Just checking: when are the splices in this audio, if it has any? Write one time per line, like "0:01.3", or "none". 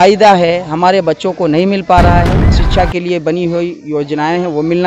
0:02.5

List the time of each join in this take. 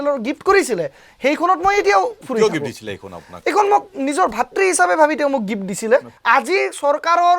0:06.1

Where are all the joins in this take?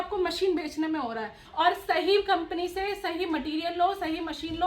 0:01.4

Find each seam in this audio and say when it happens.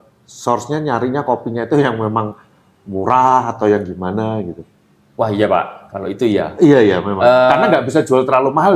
none

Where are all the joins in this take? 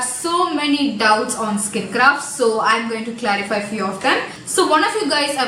none

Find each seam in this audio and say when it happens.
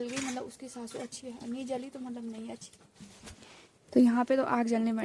none

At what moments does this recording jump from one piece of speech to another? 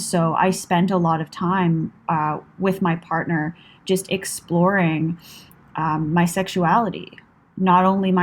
none

